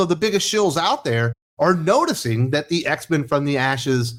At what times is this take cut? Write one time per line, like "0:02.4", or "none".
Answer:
none